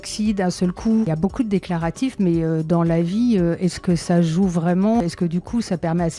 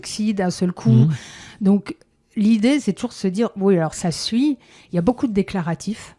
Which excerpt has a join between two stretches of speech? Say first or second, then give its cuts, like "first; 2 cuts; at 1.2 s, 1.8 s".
first; 2 cuts; at 1.0 s, 5.0 s